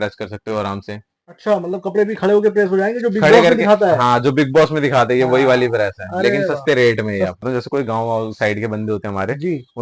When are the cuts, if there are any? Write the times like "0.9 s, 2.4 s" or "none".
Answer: 7.4 s